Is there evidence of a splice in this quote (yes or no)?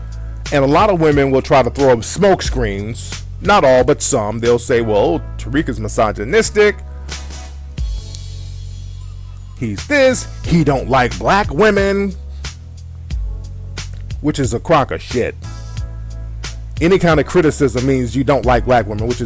yes